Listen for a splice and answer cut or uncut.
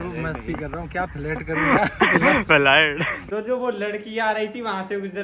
cut